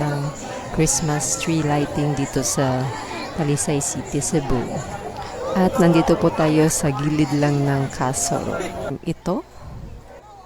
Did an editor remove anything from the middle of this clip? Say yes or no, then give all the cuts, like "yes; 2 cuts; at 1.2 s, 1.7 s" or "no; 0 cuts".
yes; 1 cut; at 8.9 s